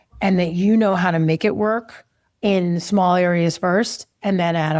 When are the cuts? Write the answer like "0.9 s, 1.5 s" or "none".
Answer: none